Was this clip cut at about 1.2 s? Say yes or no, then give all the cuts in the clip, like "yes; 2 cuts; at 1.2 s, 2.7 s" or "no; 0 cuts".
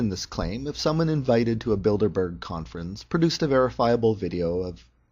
no; 1 cut; at 4.2 s